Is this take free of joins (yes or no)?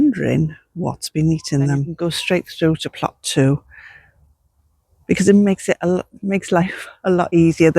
no